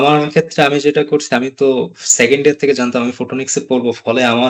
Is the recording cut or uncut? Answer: uncut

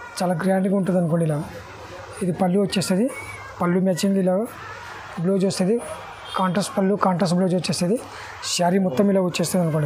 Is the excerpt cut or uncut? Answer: uncut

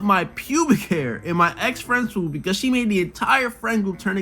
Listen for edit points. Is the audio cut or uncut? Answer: uncut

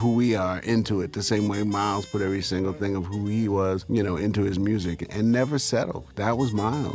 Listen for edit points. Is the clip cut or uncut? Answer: cut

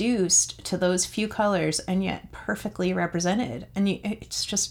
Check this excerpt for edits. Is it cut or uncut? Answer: uncut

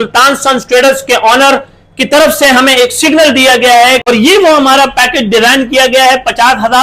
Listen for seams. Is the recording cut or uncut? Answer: cut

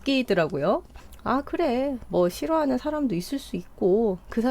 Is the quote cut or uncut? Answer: cut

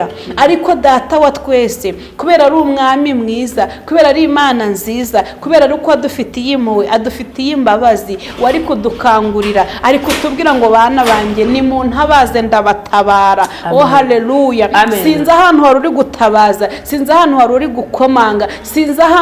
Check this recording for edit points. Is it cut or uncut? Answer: uncut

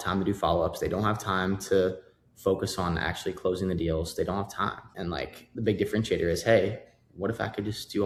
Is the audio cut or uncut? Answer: uncut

